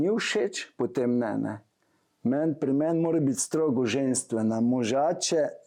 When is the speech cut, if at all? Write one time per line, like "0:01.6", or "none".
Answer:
none